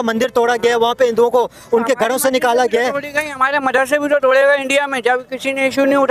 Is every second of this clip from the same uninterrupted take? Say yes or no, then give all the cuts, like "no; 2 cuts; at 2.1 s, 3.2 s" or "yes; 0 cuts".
yes; 0 cuts